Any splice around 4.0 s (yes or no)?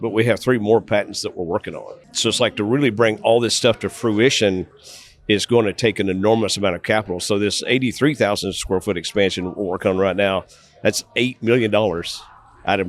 no